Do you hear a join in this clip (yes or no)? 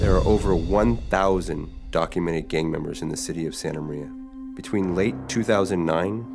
no